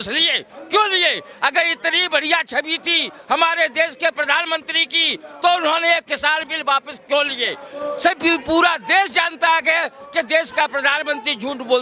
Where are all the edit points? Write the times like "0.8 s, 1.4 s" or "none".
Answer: none